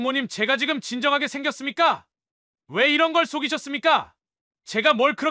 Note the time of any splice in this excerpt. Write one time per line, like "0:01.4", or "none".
none